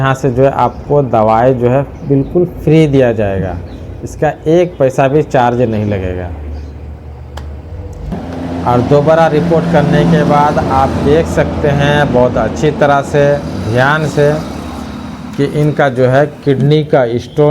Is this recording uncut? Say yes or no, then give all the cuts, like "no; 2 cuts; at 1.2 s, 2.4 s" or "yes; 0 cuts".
no; 1 cut; at 8.1 s